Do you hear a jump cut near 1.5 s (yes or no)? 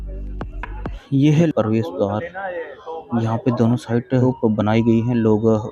yes